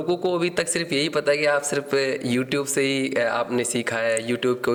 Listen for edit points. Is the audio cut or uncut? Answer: uncut